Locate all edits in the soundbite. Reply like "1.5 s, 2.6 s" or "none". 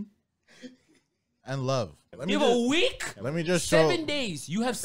2.0 s